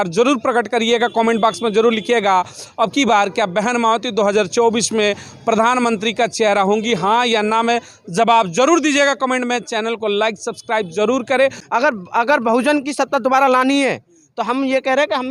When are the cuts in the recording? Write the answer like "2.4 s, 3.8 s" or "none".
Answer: 11.6 s